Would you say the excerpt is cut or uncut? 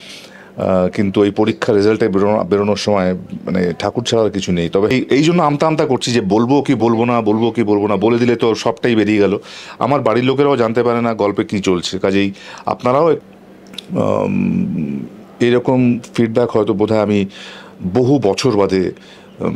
cut